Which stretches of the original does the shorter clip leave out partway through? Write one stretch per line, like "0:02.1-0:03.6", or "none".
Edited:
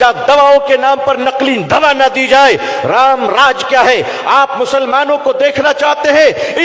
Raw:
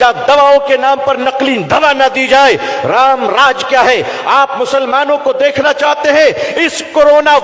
none